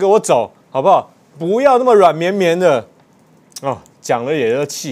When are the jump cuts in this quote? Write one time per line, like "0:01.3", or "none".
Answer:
none

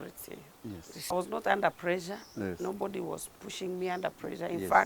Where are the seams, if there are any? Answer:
0:01.1

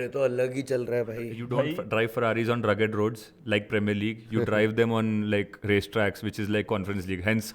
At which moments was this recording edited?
0:01.4

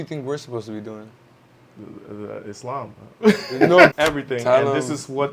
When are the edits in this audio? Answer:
0:03.9

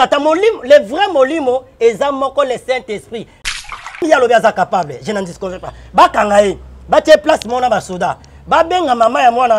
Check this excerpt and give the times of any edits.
0:03.4

